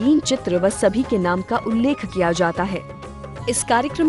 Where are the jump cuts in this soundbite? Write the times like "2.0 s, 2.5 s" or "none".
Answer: 2.8 s